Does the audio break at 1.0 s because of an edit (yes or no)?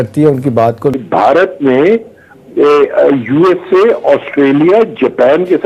yes